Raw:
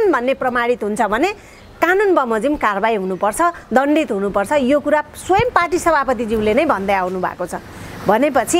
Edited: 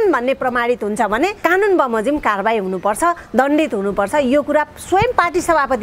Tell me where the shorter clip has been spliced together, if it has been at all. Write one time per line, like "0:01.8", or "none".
0:01.4